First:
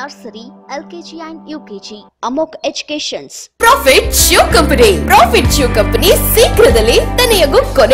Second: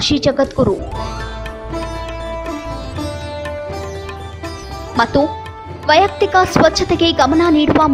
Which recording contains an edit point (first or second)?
first